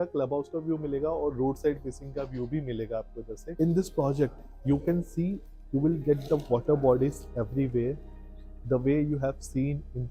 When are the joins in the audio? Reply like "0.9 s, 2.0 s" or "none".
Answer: 3.4 s